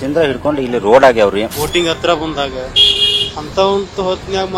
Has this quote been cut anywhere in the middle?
yes; 1 cut; at 1.5 s

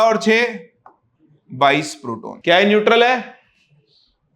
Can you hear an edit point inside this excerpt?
yes; 1 cut; at 2.3 s

